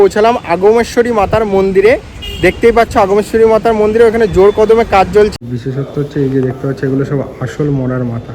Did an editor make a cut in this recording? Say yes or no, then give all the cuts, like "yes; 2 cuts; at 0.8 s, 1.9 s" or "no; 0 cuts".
yes; 1 cut; at 5.3 s